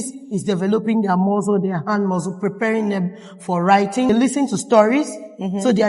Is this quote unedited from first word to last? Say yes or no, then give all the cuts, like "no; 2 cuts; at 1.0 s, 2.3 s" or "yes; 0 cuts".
no; 1 cut; at 4.1 s